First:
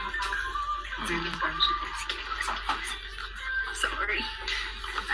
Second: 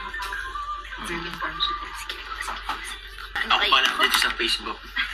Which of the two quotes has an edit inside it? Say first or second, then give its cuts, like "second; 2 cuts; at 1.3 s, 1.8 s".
second; 1 cut; at 3.3 s